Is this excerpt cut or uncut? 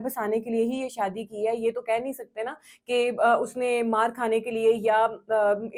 uncut